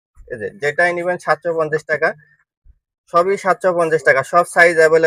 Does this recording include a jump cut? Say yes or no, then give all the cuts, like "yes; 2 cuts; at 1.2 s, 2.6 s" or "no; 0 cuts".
no; 0 cuts